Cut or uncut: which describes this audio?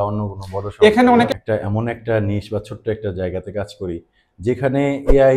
cut